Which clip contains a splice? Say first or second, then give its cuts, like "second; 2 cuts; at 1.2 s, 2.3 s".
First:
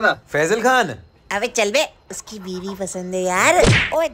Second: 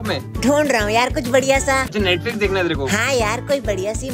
second; 1 cut; at 1.9 s